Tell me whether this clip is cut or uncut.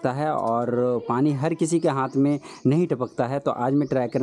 uncut